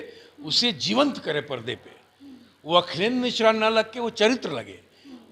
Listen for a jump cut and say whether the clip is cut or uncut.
uncut